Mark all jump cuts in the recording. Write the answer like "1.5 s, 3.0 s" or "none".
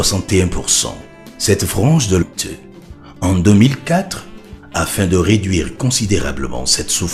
none